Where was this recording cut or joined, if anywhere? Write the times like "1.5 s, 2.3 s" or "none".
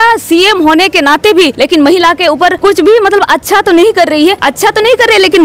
1.5 s, 2.6 s, 4.5 s